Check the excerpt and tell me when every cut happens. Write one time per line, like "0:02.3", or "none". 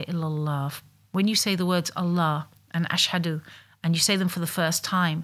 none